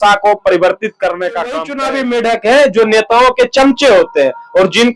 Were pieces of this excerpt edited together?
yes; 1 cut; at 1.7 s

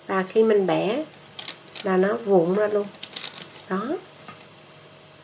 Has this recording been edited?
yes; 1 cut; at 4.1 s

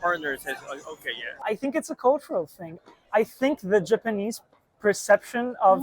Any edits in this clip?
yes; 1 cut; at 1.4 s

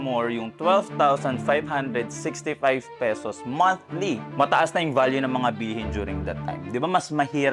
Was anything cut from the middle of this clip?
no; 0 cuts

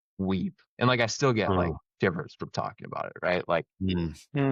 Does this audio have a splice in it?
no; 0 cuts

